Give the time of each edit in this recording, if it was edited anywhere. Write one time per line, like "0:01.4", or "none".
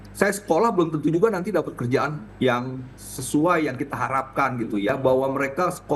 0:02.2
0:04.9